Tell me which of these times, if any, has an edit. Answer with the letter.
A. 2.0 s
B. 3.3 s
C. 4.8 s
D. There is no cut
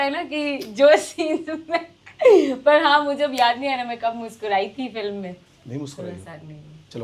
D